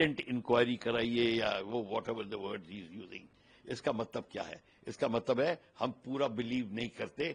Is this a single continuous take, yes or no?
yes